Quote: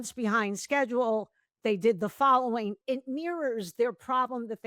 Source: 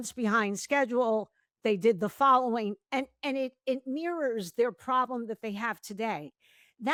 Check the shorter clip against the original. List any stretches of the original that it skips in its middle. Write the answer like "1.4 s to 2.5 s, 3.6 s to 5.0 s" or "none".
2.8 s to 3.6 s